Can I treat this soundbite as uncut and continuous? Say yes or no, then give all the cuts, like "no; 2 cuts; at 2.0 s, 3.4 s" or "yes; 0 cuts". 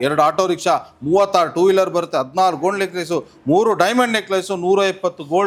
yes; 0 cuts